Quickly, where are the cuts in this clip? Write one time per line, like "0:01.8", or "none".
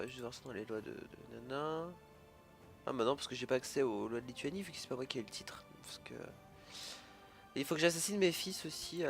0:02.0